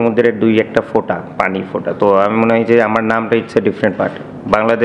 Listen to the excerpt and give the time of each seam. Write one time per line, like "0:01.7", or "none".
none